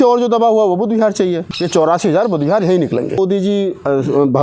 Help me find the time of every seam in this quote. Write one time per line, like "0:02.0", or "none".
0:01.5
0:03.2